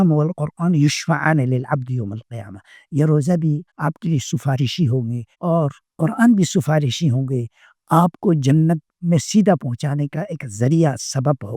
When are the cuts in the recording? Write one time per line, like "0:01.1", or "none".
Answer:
0:03.7
0:05.6